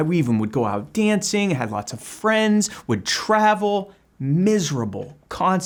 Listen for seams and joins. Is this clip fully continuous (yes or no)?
yes